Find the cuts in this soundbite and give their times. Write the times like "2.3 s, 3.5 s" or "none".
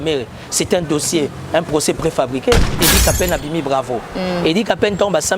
2.8 s